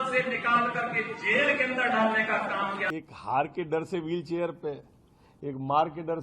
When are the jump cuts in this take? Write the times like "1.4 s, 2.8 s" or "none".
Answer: 2.8 s